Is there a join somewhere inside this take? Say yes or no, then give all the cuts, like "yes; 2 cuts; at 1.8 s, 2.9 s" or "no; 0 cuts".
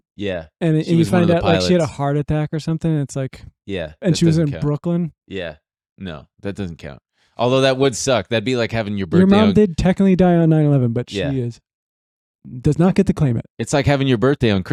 no; 0 cuts